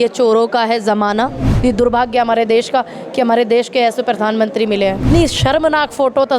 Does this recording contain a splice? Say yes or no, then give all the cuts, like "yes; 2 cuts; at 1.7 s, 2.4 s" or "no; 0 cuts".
yes; 2 cuts; at 1.4 s, 5.0 s